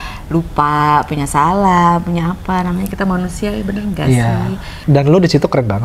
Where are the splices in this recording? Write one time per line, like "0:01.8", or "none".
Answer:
0:04.7

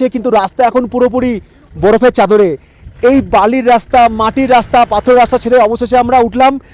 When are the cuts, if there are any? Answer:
none

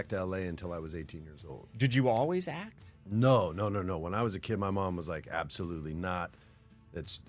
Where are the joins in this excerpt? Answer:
none

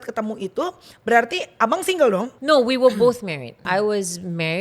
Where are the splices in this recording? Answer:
0:02.3
0:03.6

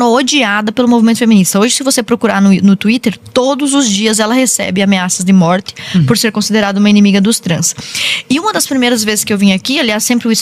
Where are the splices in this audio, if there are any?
none

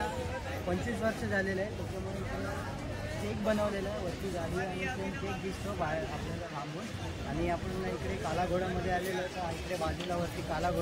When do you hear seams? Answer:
none

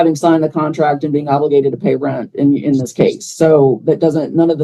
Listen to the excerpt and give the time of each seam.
none

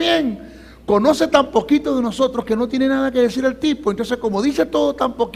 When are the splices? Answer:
0:02.5

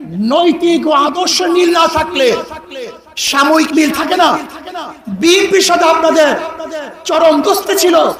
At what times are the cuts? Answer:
none

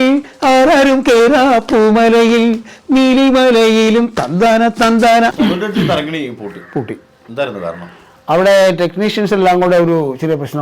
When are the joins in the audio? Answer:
0:05.3

